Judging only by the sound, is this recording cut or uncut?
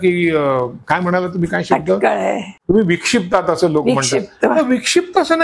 cut